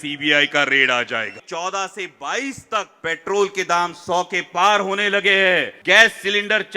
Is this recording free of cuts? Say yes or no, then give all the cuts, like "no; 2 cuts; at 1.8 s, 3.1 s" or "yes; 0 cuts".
no; 3 cuts; at 1.4 s, 2.9 s, 5.7 s